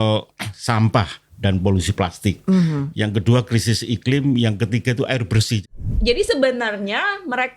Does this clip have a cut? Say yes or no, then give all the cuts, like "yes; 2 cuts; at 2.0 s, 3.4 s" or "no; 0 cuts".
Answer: yes; 1 cut; at 5.6 s